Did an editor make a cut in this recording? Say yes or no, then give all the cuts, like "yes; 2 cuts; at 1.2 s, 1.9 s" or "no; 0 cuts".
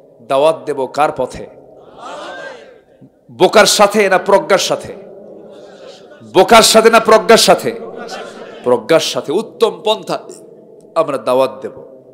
no; 0 cuts